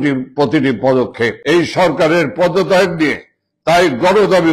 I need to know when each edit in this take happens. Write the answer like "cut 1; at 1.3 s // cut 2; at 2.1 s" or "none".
cut 1; at 1.4 s